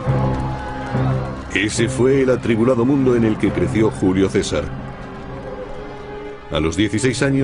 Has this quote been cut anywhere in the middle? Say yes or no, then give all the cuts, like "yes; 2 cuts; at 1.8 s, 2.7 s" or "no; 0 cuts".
yes; 1 cut; at 2.3 s